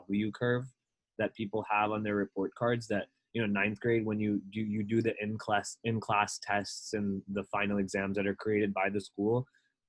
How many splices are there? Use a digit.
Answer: 0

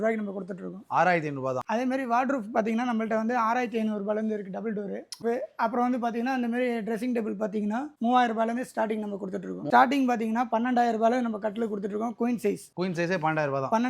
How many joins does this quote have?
3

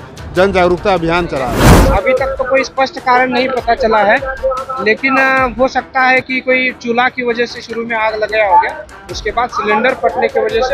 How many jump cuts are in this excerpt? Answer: 1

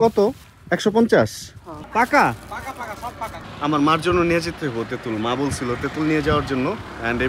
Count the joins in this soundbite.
2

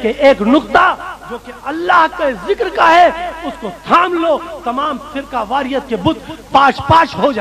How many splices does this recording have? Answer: 0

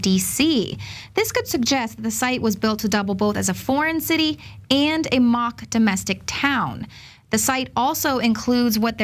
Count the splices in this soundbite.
1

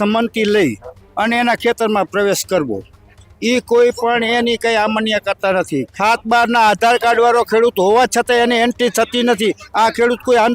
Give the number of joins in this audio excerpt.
1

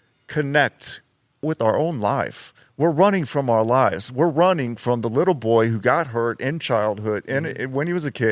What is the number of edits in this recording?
1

